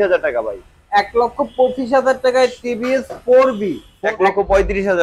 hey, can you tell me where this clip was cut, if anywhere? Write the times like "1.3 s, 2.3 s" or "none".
3.8 s